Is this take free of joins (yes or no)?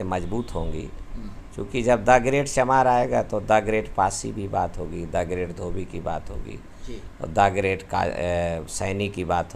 yes